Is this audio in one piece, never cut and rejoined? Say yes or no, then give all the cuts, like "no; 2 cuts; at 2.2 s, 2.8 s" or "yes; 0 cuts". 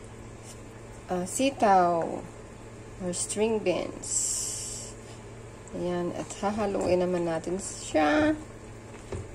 yes; 0 cuts